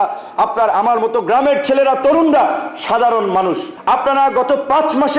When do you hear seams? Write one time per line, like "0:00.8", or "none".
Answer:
0:03.7